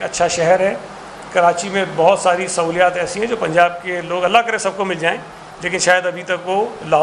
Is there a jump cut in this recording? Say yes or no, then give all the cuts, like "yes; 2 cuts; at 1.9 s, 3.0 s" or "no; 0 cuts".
no; 0 cuts